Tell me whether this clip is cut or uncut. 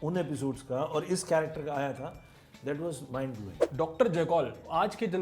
cut